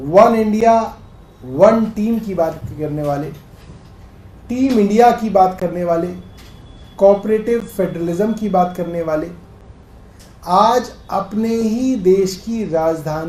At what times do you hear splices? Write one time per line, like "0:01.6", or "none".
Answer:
none

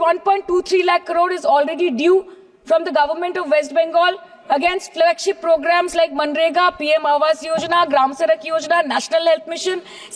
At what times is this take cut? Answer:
none

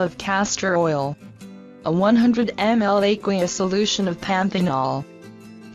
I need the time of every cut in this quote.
0:04.7

